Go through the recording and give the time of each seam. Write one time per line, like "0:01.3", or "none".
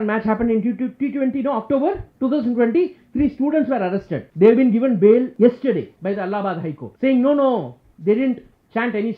0:02.1
0:04.2
0:05.6
0:06.9

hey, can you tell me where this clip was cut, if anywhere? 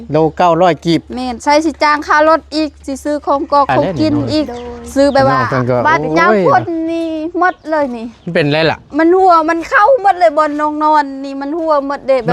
0:05.4

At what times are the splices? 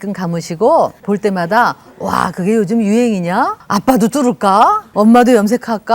0:01.0
0:03.6
0:04.8

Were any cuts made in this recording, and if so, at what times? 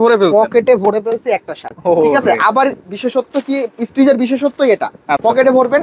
none

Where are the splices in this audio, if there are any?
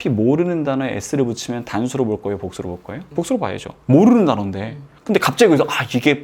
0:02.9

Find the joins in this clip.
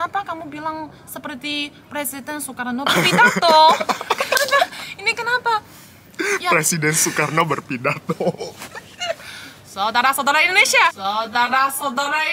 none

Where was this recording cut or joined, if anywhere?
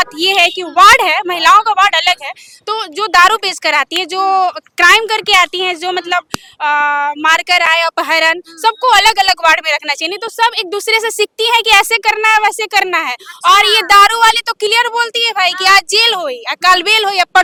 none

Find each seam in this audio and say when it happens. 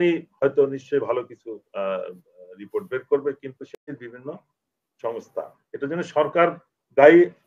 0:03.7

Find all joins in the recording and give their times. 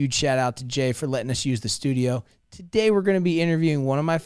none

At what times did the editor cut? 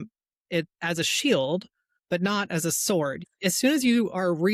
0:03.2

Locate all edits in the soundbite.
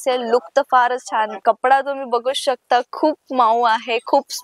0:01.4

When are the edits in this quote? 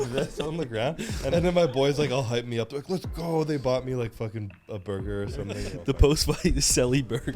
0:01.2
0:05.7

